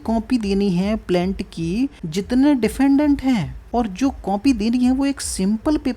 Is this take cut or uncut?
cut